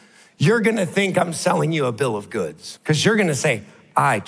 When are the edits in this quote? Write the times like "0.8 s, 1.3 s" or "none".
2.7 s